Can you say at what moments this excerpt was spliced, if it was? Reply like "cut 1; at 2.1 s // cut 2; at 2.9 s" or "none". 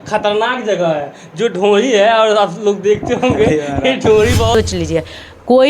cut 1; at 4.5 s